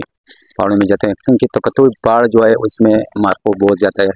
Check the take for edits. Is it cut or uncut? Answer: uncut